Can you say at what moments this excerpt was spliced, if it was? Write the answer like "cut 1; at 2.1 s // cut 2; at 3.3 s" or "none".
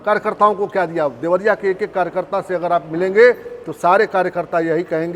none